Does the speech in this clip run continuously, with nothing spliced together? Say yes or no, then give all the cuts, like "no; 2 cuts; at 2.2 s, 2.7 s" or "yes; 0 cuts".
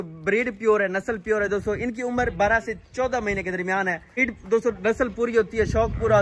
no; 1 cut; at 4.3 s